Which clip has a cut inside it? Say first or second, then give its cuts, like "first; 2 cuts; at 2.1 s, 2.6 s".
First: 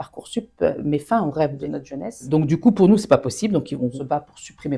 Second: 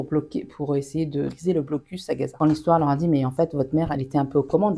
second; 1 cut; at 2.4 s